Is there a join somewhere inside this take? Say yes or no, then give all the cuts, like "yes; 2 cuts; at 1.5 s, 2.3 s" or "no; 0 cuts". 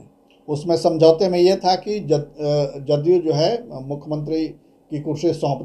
no; 0 cuts